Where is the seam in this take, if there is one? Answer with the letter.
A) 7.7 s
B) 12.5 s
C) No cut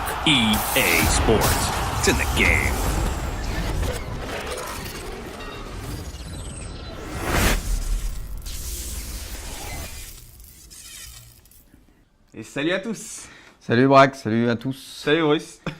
A